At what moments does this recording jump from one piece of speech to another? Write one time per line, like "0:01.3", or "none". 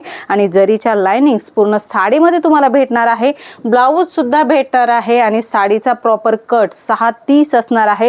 none